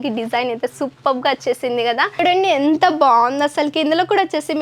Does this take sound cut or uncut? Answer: cut